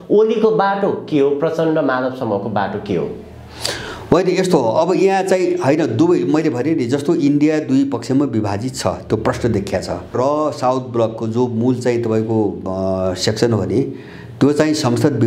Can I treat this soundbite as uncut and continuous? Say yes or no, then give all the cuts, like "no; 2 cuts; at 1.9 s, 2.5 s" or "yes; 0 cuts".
yes; 0 cuts